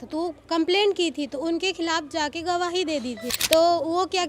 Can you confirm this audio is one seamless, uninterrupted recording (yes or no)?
no